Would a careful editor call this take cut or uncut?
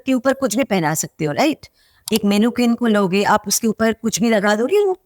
uncut